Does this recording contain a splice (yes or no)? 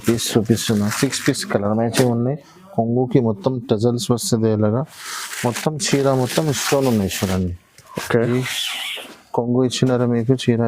yes